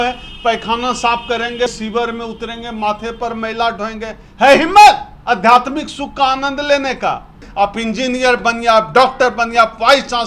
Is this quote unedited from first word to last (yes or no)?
no